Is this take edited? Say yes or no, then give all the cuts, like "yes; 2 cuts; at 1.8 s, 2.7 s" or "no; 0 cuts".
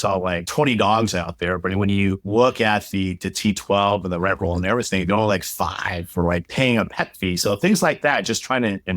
no; 0 cuts